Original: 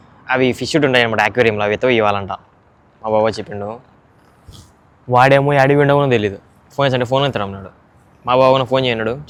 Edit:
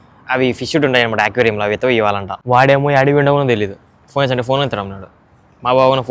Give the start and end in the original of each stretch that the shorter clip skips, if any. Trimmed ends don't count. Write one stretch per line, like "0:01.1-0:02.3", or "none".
0:02.3-0:04.9